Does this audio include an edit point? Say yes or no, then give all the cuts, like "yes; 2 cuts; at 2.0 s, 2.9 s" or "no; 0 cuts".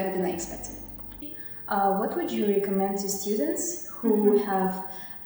yes; 1 cut; at 1.2 s